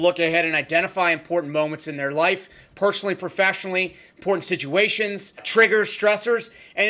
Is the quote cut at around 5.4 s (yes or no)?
yes